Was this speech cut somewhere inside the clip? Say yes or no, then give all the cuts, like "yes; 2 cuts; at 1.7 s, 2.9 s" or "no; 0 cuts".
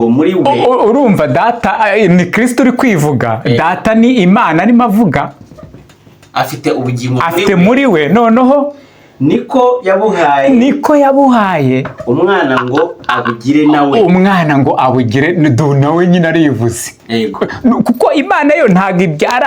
no; 0 cuts